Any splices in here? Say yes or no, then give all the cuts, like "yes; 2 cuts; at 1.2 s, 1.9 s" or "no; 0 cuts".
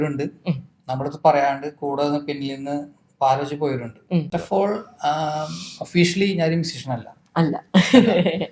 yes; 1 cut; at 4.3 s